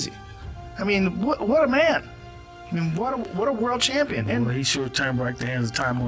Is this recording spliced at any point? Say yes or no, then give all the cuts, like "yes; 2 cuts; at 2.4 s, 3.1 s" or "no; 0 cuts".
no; 0 cuts